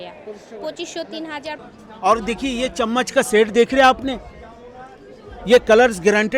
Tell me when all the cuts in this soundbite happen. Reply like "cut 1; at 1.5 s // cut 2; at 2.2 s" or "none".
cut 1; at 1.5 s